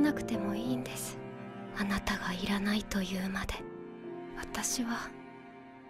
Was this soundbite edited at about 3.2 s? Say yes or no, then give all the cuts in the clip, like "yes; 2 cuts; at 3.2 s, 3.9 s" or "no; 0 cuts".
no; 1 cut; at 1.2 s